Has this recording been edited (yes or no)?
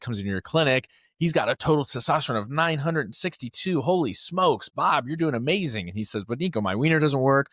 no